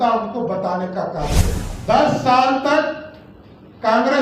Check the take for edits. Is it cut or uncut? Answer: cut